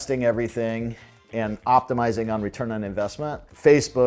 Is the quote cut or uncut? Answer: uncut